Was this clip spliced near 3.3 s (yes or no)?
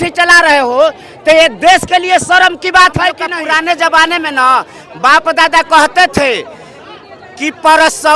yes